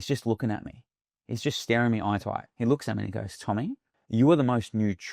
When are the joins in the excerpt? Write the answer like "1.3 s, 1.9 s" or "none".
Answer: 2.4 s, 3.9 s